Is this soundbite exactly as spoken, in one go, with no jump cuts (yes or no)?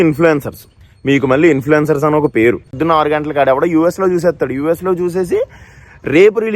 no